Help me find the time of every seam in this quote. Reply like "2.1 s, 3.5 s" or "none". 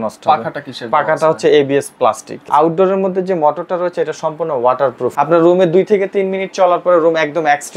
2.3 s, 5.1 s